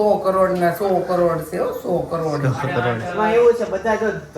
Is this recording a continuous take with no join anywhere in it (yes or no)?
no